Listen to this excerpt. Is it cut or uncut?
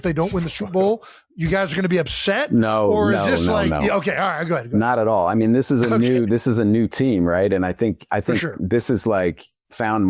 uncut